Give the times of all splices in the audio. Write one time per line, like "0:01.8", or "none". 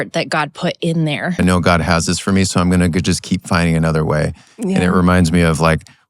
0:01.4

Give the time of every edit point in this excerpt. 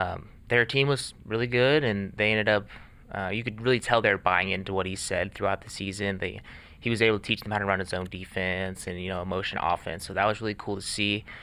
none

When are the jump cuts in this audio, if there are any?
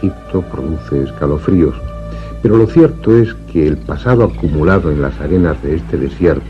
0:02.8

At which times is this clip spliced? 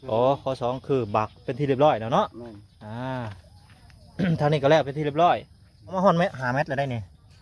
0:06.0

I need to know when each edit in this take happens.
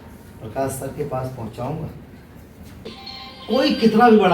0:03.0

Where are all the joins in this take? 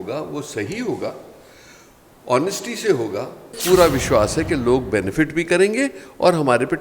0:03.5

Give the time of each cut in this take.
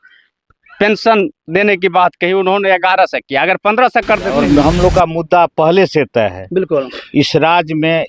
0:04.3

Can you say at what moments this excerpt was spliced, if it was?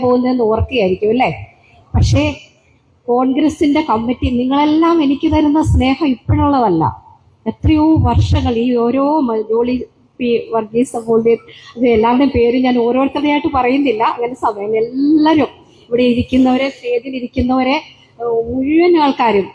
none

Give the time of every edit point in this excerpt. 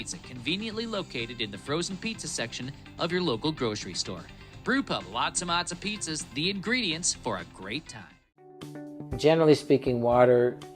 0:05.9

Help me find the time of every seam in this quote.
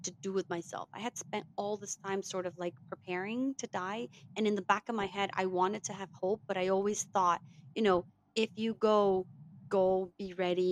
none

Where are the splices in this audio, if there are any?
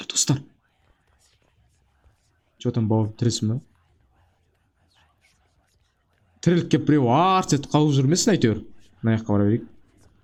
none

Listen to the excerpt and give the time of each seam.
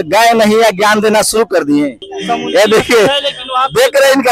0:02.0

